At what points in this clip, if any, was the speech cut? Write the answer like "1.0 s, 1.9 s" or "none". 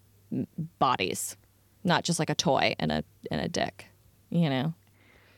none